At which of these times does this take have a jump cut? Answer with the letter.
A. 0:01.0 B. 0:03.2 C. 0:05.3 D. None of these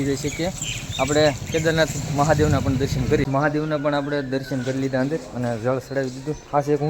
B